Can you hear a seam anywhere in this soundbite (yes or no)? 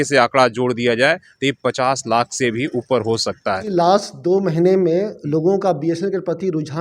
yes